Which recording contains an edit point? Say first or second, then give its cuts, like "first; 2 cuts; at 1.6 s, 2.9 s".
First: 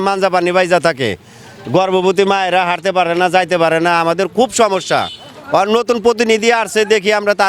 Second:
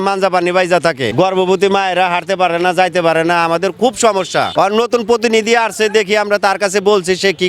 second; 2 cuts; at 1.1 s, 4.5 s